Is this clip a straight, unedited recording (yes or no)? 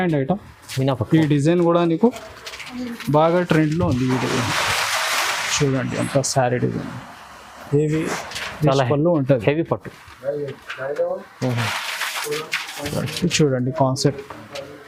yes